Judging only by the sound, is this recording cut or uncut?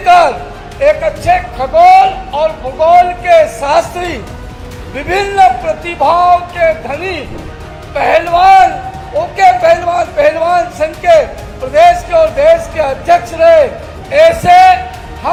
uncut